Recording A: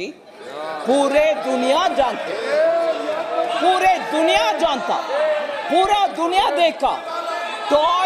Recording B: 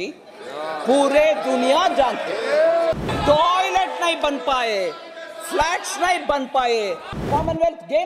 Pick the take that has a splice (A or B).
B